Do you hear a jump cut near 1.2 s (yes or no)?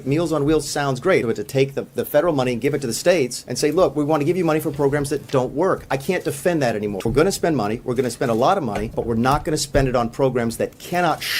yes